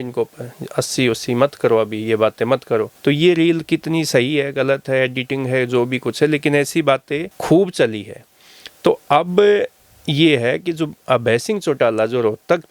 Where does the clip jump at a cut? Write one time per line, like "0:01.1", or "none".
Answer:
none